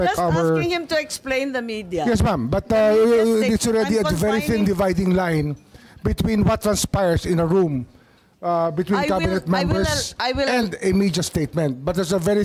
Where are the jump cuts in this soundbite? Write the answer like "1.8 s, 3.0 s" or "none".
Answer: none